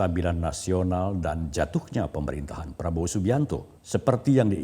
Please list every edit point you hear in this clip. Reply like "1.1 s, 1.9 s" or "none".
3.7 s